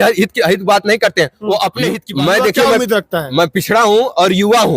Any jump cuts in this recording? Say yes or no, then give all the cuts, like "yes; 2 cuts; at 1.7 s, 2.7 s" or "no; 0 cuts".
yes; 1 cut; at 2.0 s